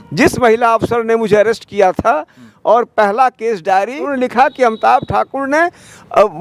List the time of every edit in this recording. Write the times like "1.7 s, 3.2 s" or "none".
4.1 s